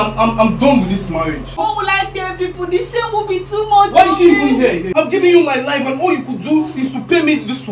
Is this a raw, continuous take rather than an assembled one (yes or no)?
no